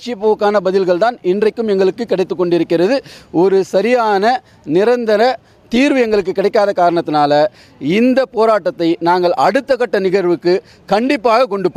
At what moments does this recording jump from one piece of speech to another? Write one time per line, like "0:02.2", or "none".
none